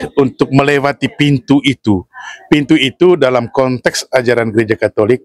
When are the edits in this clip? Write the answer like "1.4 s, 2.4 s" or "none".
none